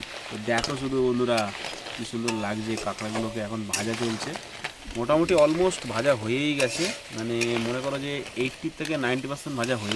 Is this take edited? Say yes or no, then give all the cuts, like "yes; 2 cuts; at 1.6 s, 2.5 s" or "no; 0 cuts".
no; 0 cuts